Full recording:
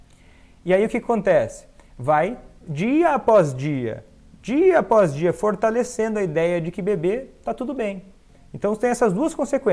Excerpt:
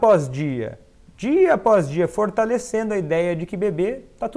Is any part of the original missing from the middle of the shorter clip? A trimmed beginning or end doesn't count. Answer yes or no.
no